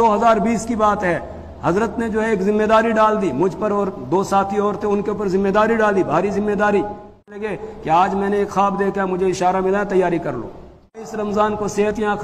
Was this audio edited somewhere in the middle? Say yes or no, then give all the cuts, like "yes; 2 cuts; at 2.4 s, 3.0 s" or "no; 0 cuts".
yes; 2 cuts; at 7.5 s, 11.1 s